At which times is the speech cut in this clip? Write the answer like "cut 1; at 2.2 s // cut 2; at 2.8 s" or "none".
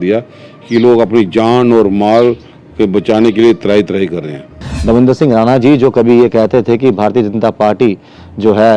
cut 1; at 4.7 s